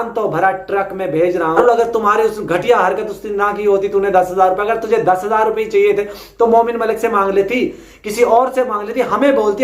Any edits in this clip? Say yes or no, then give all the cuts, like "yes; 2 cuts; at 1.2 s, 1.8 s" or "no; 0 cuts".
yes; 1 cut; at 1.6 s